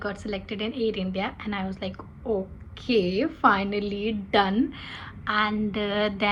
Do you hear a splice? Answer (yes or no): no